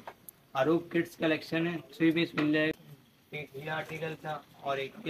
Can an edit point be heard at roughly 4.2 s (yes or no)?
no